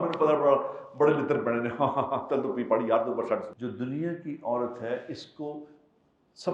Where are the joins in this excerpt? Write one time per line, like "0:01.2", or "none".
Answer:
0:03.5